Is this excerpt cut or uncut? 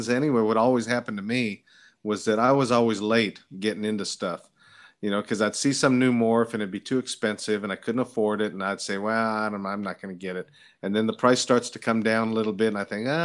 uncut